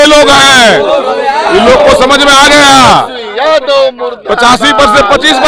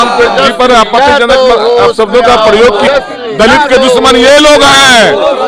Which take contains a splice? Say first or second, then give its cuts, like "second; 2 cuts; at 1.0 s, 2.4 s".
second; 1 cut; at 2.8 s